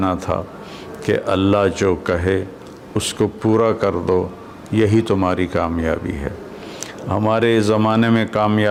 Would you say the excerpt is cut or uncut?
uncut